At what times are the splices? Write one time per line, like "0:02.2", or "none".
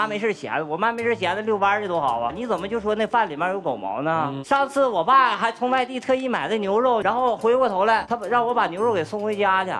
0:02.4
0:04.4
0:08.1